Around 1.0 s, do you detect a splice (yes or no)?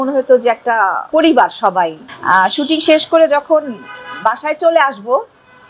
yes